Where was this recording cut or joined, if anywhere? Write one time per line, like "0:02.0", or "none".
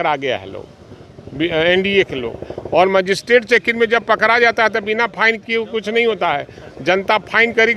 none